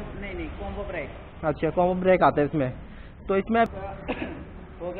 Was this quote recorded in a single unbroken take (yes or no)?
no